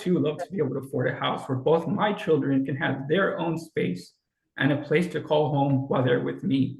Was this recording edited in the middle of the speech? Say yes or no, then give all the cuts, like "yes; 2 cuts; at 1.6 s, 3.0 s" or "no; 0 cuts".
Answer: no; 0 cuts